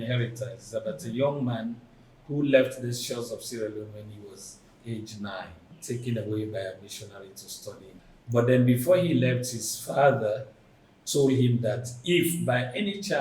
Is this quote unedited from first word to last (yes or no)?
no